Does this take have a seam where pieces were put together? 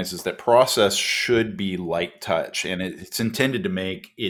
no; 0 cuts

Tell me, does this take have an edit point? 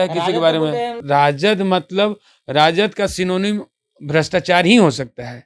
yes; 1 cut; at 1.0 s

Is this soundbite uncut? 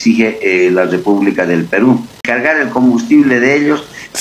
no; 1 cut; at 2.2 s

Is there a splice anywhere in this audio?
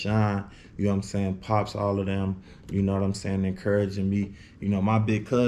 no; 0 cuts

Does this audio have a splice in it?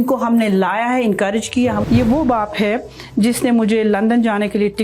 yes; 1 cut; at 1.8 s

